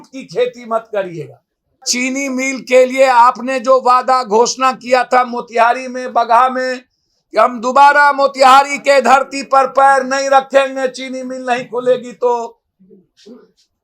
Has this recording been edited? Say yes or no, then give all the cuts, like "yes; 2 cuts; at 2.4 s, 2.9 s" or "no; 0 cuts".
yes; 1 cut; at 1.9 s